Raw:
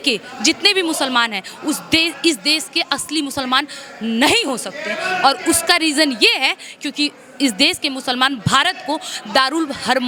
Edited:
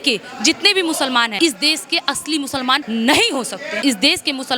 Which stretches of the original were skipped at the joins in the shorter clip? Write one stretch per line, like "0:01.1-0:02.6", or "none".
0:01.3-0:02.2
0:03.7-0:04.0
0:04.8-0:07.3